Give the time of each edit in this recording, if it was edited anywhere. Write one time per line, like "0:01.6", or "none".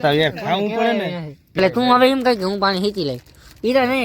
0:01.6